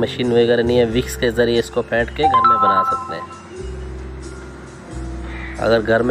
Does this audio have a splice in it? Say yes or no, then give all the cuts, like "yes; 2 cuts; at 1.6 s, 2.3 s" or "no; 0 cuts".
no; 0 cuts